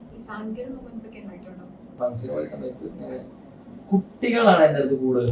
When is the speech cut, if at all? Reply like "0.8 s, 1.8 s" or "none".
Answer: 1.9 s

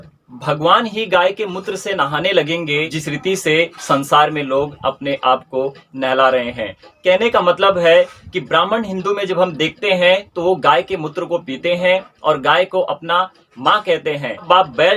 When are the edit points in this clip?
3.0 s

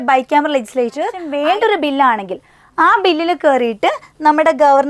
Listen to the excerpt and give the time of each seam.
1.2 s

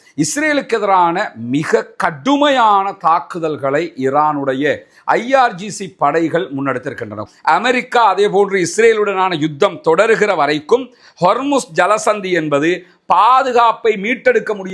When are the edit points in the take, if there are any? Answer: 7.2 s

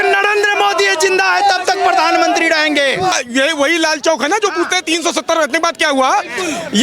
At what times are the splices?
3.1 s

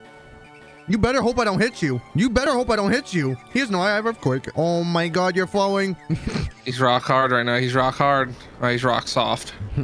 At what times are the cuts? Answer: 2.4 s, 4.5 s

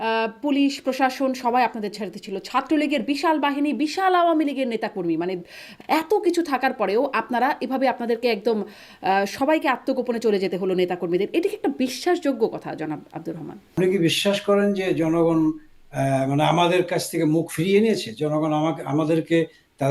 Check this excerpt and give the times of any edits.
5.6 s, 13.7 s

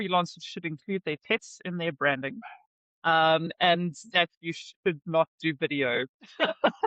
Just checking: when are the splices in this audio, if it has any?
none

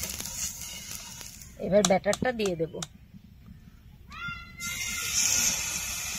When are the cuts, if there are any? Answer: 1.4 s

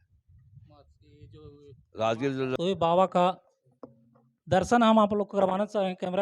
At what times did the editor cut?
2.6 s

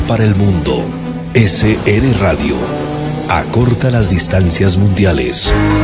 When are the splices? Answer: none

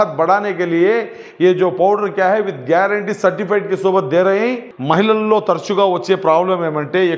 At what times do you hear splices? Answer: 4.7 s

